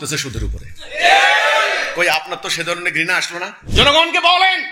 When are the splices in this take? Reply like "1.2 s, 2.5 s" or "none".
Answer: 3.6 s